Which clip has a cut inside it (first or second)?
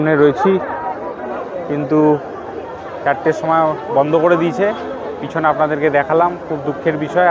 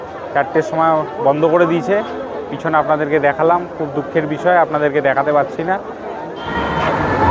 second